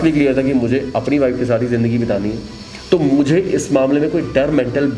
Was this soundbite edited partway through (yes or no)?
no